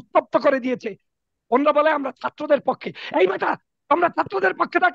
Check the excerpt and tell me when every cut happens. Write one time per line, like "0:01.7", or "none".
none